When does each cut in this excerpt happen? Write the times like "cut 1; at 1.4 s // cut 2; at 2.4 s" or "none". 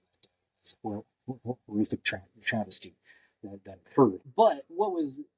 cut 1; at 4.2 s